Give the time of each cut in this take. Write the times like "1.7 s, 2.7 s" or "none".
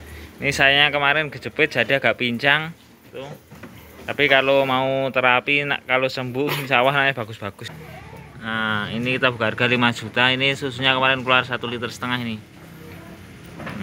7.7 s